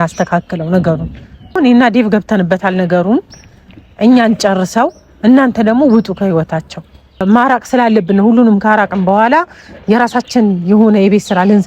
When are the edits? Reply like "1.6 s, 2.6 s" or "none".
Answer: 1.6 s, 7.2 s